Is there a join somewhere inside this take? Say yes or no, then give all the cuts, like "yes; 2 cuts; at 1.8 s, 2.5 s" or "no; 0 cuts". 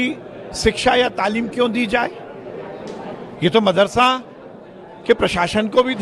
no; 0 cuts